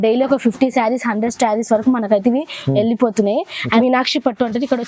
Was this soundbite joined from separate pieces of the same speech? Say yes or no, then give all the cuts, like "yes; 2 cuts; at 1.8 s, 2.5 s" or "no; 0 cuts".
yes; 1 cut; at 3.6 s